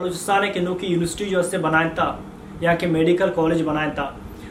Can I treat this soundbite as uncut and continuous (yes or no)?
yes